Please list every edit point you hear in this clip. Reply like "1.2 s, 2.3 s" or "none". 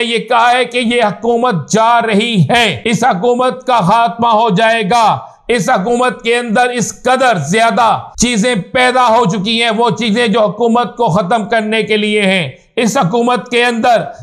2.8 s, 8.1 s

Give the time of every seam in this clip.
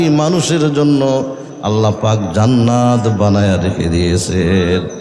none

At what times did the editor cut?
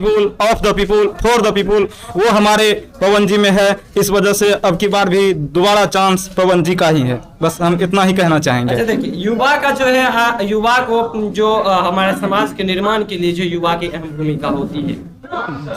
none

